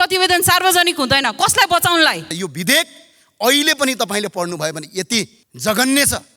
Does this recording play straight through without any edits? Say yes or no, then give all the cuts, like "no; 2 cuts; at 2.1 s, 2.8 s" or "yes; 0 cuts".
no; 2 cuts; at 2.4 s, 5.4 s